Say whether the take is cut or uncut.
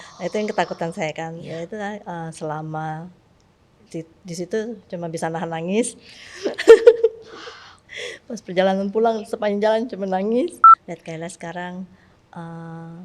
cut